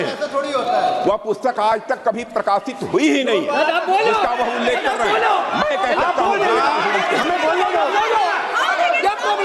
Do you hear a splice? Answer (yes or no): no